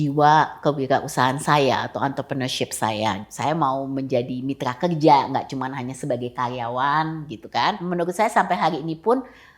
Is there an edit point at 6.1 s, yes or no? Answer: no